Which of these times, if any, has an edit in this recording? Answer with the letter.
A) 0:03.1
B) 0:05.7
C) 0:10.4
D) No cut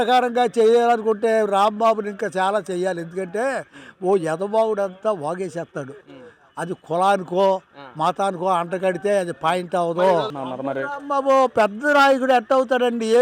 C